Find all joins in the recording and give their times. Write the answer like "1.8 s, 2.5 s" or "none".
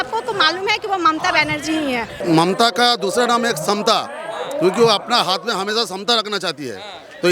2.2 s